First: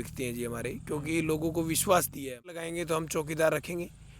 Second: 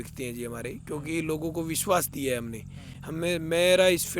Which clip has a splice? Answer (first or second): first